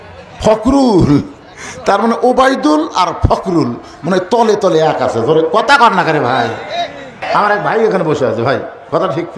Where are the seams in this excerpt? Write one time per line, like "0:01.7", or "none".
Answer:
0:07.2